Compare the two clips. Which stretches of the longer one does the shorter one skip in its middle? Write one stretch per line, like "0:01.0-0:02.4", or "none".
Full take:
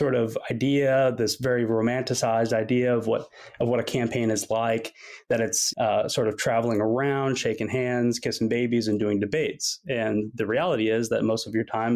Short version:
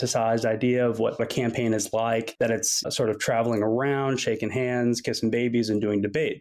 0:03.3-0:03.8
0:05.4-0:06.0